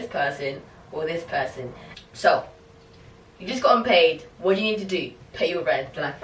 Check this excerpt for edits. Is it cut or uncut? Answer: uncut